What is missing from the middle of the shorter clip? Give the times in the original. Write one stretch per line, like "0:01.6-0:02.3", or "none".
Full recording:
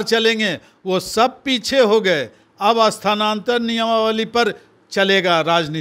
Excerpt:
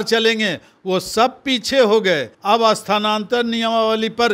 0:02.3-0:02.5